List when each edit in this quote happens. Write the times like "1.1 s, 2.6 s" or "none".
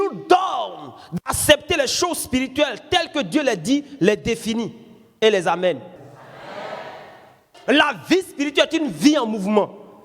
6.1 s, 7.5 s